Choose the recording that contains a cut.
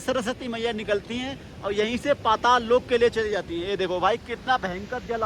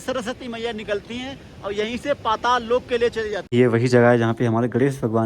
second; 1 cut; at 3.5 s

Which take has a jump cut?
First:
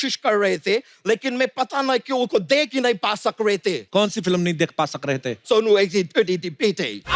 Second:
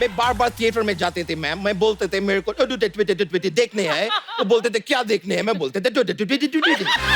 first; 2 cuts; at 3.8 s, 5.4 s

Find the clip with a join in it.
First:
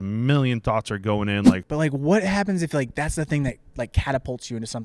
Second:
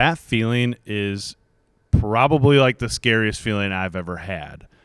first; 1 cut; at 1.6 s

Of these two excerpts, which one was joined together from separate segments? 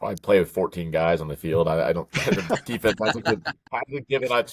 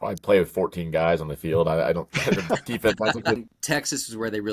second; 1 cut; at 3.5 s

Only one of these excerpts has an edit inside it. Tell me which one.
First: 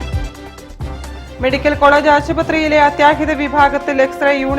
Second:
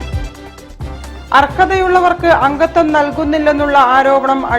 first; 1 cut; at 1.0 s

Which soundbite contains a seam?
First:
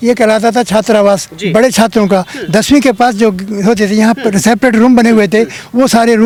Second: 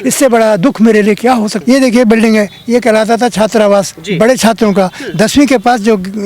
second; 1 cut; at 1.6 s

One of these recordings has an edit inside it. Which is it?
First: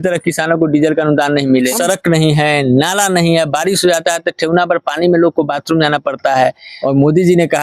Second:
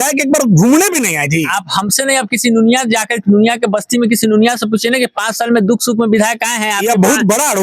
first; 2 cuts; at 1.7 s, 6.7 s

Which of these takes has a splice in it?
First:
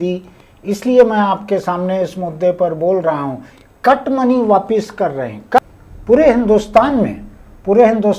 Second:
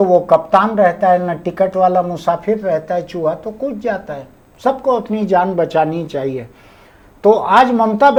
first; 1 cut; at 5.6 s

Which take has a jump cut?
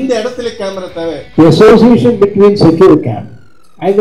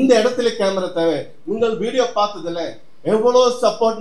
first; 1 cut; at 1.2 s

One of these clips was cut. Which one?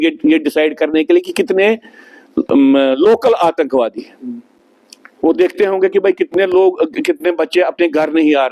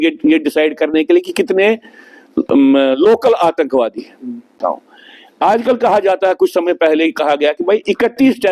second; 1 cut; at 4.5 s

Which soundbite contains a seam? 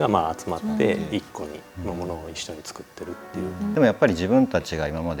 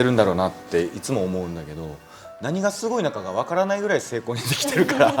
first; 1 cut; at 3.7 s

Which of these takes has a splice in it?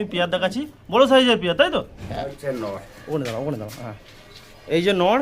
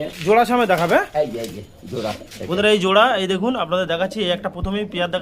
first; 1 cut; at 2.3 s

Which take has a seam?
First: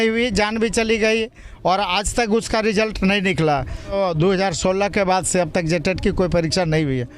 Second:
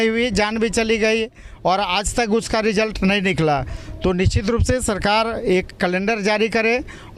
first; 1 cut; at 3.9 s

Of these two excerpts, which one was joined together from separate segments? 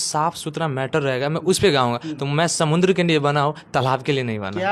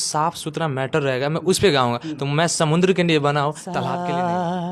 second; 1 cut; at 3.7 s

